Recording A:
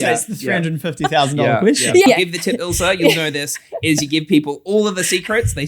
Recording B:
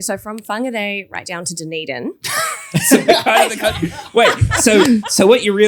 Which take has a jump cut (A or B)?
A